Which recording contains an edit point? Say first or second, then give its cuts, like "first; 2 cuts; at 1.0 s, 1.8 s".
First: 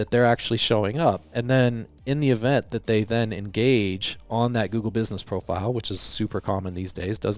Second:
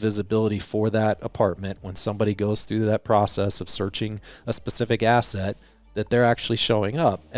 second; 1 cut; at 4.3 s